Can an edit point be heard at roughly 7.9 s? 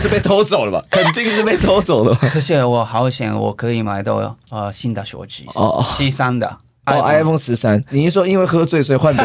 yes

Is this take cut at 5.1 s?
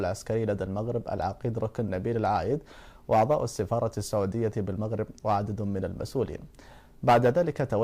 yes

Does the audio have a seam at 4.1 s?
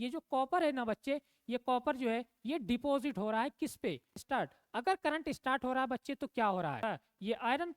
yes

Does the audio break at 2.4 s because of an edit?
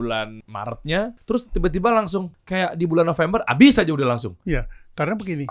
yes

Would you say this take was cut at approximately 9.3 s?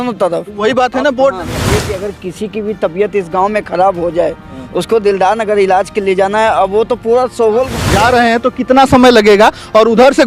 no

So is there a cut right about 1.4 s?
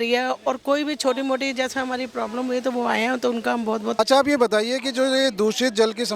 no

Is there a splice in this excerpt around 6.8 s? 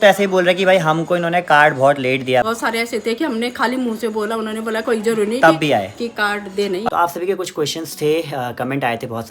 yes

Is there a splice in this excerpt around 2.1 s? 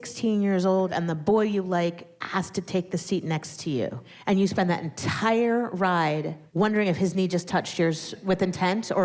yes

